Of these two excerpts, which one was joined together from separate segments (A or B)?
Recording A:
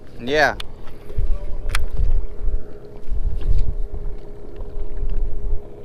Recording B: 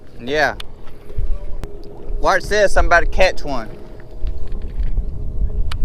B